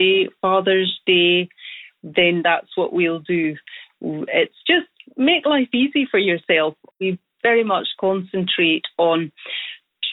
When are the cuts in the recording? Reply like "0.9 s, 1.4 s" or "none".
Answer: 7.0 s